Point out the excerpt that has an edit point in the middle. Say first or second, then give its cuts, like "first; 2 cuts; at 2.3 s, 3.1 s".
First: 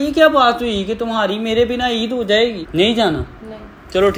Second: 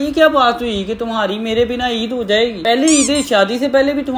first; 1 cut; at 2.6 s